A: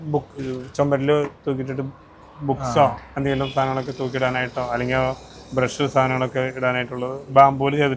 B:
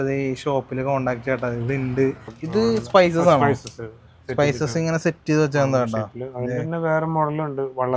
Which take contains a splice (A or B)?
B